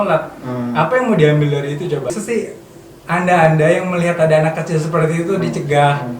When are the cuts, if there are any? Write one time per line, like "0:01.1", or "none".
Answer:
0:02.1